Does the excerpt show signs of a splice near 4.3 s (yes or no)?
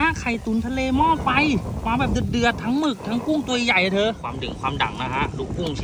yes